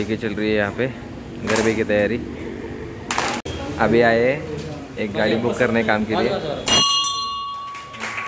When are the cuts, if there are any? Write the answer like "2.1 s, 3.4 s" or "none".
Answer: 3.4 s